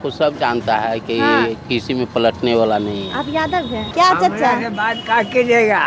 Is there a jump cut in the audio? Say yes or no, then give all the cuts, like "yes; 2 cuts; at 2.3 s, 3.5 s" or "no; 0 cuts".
yes; 1 cut; at 3.8 s